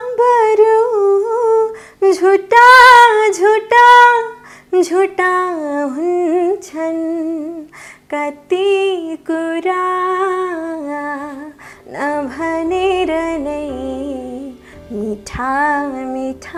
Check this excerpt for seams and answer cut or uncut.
uncut